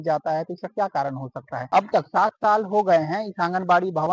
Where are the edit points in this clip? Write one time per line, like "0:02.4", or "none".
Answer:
0:01.6